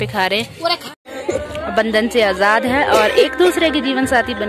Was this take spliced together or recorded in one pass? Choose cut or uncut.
cut